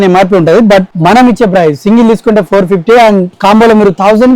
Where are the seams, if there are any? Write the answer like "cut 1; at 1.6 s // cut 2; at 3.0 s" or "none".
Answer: cut 1; at 0.9 s